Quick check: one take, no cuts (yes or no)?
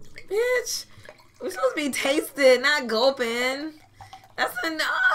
yes